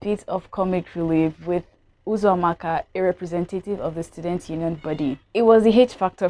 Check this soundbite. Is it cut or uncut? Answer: cut